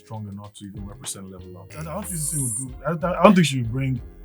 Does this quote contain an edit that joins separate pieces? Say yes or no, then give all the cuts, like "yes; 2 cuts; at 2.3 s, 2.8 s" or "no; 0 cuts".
yes; 1 cut; at 1.8 s